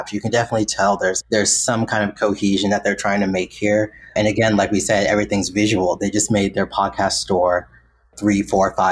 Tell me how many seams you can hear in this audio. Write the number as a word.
one